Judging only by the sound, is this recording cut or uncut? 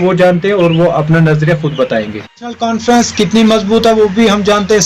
cut